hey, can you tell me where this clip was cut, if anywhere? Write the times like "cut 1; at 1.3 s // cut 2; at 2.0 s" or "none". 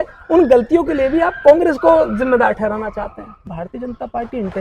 cut 1; at 3.5 s